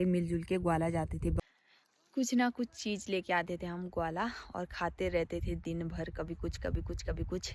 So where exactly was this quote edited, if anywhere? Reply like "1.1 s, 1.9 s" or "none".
1.5 s

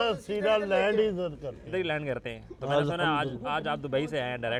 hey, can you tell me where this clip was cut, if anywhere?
none

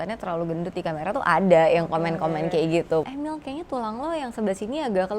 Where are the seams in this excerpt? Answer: 3.1 s

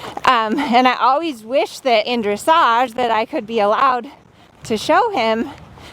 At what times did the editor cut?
2.1 s

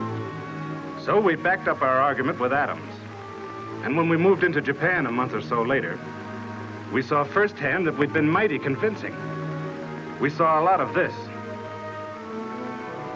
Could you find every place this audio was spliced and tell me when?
7.4 s

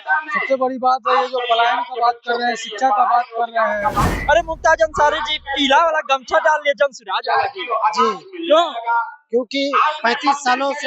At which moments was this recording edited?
4.1 s

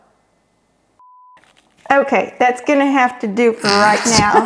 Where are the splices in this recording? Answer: 1.0 s

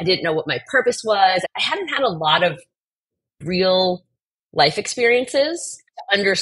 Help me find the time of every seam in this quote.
1.4 s

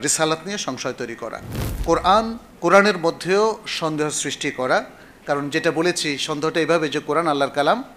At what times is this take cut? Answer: 1.7 s, 2.4 s

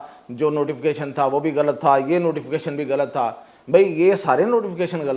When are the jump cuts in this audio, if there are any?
none

